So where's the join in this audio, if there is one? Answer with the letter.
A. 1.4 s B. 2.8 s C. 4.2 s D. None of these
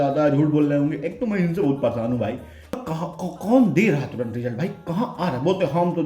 B